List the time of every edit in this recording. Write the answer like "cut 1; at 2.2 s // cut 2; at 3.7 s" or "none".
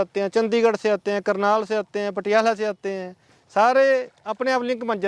none